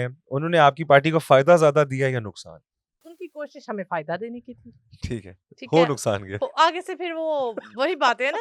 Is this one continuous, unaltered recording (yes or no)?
no